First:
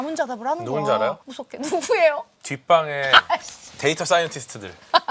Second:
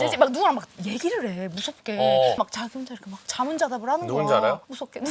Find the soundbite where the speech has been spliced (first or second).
second